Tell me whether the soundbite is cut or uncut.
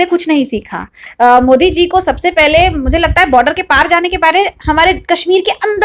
cut